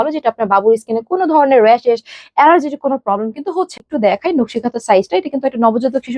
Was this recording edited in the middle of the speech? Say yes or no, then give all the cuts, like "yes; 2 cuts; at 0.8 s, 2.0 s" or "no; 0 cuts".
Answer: yes; 1 cut; at 3.8 s